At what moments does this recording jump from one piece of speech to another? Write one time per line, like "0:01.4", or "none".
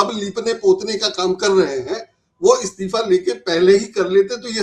none